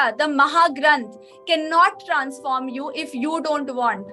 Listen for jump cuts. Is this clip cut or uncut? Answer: uncut